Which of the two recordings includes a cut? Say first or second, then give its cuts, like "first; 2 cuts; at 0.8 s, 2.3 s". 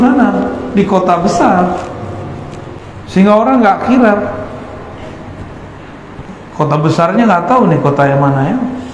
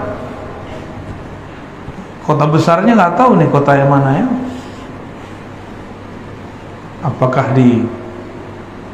first; 1 cut; at 2.8 s